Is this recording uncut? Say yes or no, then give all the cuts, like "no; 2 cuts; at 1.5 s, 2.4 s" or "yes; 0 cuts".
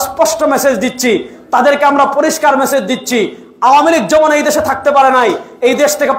yes; 0 cuts